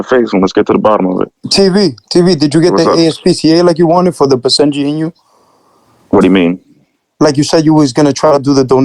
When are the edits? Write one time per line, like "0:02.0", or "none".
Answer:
none